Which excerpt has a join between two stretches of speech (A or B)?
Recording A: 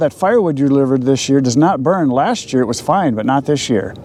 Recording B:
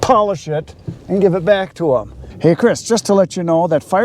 B